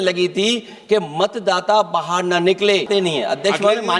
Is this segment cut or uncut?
cut